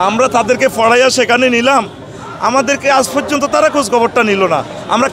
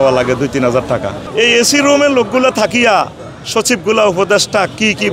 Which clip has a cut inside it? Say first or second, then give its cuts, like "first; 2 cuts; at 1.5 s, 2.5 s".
second; 1 cut; at 1.2 s